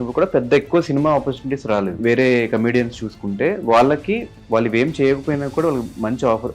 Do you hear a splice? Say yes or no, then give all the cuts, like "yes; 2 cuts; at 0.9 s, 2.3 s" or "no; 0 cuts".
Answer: yes; 1 cut; at 2.0 s